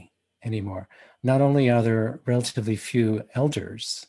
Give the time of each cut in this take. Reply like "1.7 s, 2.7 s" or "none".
none